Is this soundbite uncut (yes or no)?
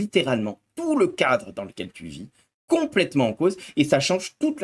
yes